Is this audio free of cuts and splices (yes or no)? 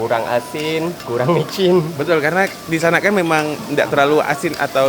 no